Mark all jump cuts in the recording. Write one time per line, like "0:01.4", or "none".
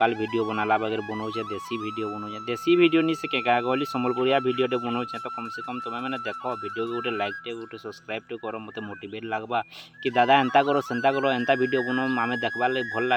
none